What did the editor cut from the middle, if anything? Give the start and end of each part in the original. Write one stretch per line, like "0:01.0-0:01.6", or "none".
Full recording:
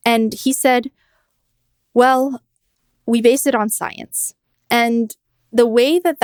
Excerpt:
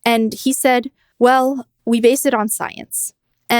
0:01.0-0:01.8
0:02.4-0:02.9